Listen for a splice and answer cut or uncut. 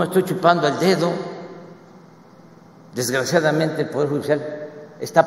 uncut